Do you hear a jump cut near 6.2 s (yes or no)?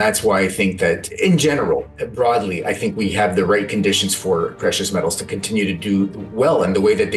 yes